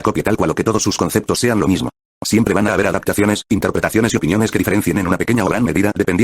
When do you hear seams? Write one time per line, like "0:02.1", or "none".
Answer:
none